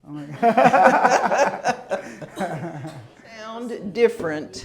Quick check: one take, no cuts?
no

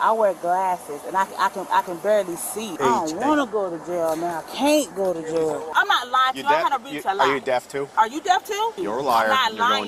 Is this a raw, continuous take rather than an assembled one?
no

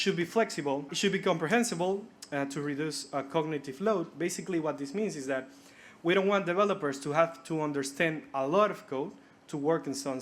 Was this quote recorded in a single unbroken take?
no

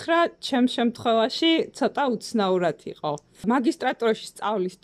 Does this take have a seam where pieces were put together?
yes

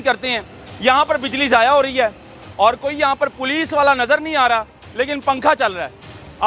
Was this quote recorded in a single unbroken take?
no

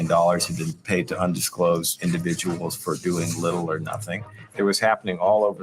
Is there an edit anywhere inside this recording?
yes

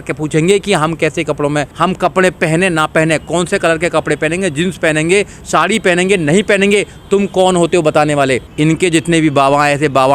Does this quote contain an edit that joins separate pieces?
yes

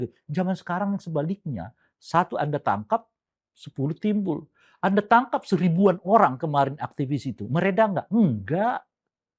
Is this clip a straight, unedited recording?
yes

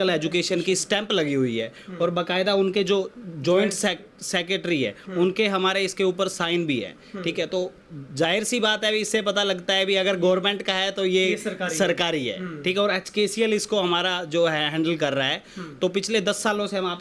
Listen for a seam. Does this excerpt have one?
no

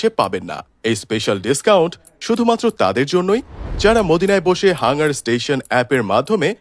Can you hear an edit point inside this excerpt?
no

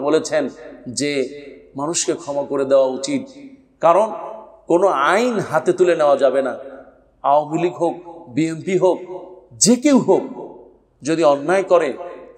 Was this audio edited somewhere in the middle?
no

